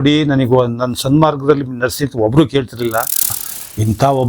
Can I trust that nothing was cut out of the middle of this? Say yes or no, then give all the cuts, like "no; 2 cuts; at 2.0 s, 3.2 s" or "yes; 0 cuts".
no; 1 cut; at 3.3 s